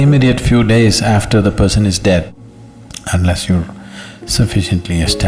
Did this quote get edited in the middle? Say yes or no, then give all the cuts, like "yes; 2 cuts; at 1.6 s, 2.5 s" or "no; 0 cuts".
yes; 1 cut; at 2.3 s